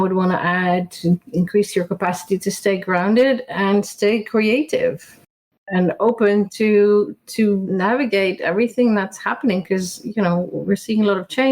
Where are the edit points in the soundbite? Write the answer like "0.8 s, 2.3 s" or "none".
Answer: 5.6 s, 7.7 s